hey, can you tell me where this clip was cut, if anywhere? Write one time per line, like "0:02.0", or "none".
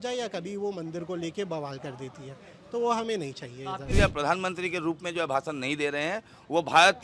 0:03.9